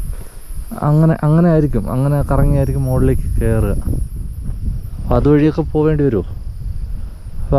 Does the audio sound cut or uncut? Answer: uncut